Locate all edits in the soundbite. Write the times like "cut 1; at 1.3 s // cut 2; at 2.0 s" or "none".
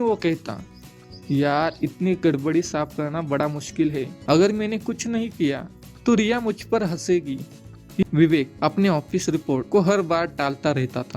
cut 1; at 4.1 s // cut 2; at 8.0 s